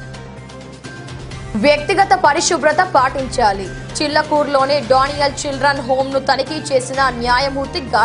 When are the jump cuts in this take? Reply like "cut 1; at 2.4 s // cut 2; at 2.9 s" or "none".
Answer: cut 1; at 1.2 s